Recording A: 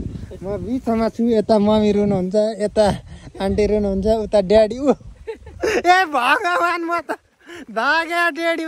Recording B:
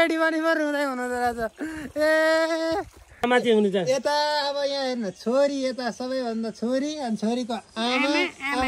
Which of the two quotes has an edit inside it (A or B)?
B